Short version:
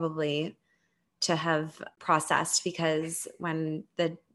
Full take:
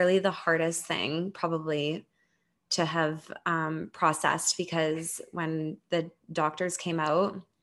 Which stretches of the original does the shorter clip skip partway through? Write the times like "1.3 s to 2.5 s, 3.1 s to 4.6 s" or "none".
3.4 s to 3.8 s